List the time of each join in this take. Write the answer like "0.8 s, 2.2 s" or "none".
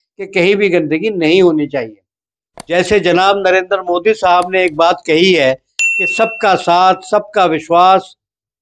2.3 s